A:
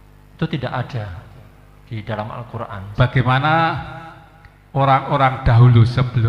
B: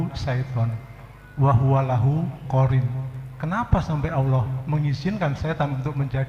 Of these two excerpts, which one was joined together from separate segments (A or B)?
A